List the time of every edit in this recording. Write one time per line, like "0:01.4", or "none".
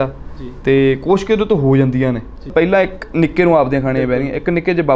0:02.5